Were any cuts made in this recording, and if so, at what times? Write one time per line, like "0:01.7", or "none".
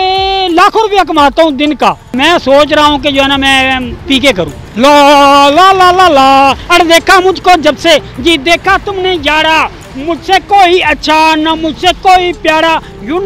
0:02.1
0:04.6